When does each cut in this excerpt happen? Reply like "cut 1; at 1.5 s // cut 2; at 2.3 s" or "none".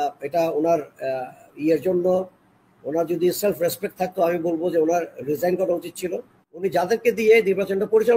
cut 1; at 6.5 s